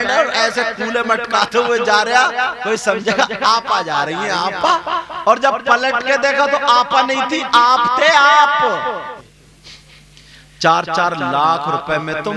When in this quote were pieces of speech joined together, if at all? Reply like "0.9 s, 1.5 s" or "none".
9.2 s